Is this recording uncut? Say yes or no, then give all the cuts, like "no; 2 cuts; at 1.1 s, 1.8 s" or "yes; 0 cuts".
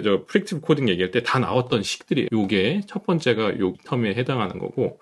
no; 2 cuts; at 2.3 s, 3.8 s